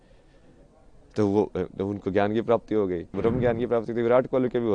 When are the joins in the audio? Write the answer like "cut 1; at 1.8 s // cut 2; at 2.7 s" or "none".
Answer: cut 1; at 3.1 s